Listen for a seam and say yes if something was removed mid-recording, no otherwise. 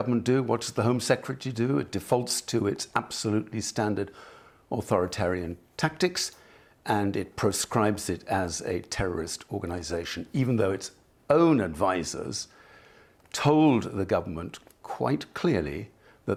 no